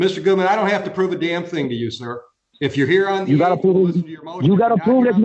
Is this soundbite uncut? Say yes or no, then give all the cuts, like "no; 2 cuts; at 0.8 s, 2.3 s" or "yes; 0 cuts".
yes; 0 cuts